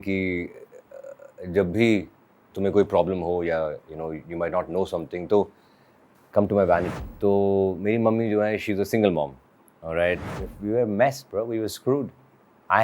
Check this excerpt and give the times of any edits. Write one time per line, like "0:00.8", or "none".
0:06.9
0:10.4